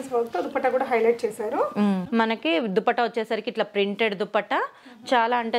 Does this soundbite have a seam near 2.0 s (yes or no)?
yes